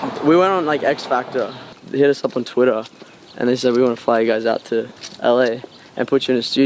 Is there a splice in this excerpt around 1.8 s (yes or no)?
yes